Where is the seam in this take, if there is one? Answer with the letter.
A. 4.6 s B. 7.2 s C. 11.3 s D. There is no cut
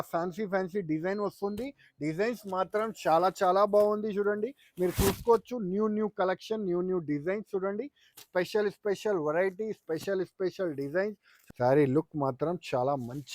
C